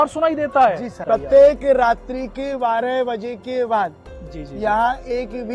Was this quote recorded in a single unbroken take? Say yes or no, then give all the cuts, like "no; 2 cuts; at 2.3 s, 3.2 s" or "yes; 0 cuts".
no; 1 cut; at 1.0 s